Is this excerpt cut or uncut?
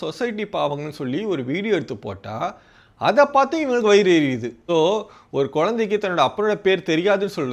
cut